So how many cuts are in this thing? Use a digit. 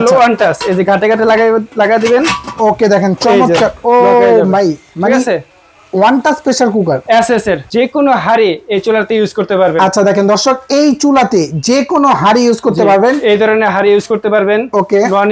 1